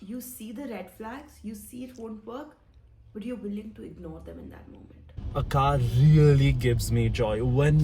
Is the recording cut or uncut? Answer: cut